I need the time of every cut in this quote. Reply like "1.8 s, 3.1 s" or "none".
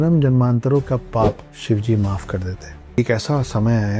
1.5 s, 3.0 s